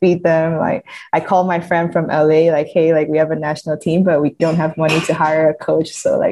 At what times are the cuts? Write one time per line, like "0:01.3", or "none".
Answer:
0:04.4